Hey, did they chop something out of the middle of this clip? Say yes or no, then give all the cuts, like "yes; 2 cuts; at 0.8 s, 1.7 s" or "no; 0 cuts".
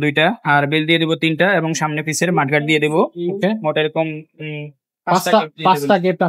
no; 0 cuts